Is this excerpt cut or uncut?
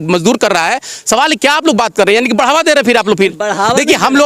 uncut